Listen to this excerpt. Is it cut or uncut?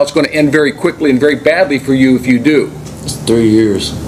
uncut